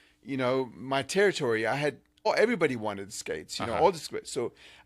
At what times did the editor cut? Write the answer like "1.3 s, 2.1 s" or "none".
2.1 s